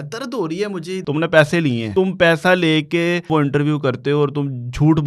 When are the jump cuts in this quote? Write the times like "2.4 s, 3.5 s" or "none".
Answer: 1.0 s, 1.8 s, 3.3 s